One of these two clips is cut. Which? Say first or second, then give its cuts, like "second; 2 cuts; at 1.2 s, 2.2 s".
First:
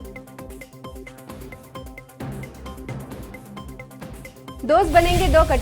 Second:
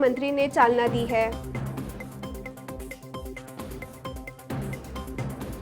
first; 2 cuts; at 2.8 s, 4.9 s